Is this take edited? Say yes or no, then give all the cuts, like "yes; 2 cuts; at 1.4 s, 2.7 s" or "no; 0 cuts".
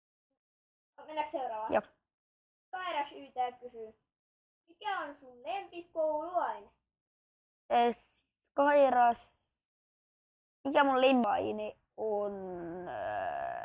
yes; 1 cut; at 11.3 s